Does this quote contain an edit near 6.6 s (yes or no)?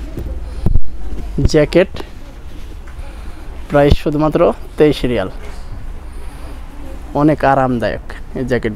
no